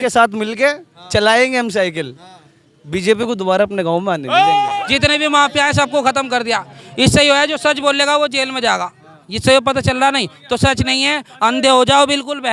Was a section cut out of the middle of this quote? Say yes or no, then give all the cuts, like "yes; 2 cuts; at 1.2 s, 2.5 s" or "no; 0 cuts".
yes; 1 cut; at 4.7 s